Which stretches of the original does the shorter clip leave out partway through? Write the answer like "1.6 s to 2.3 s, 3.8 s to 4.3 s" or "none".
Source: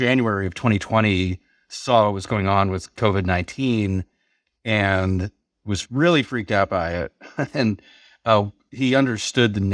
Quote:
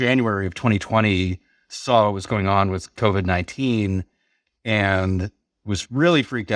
none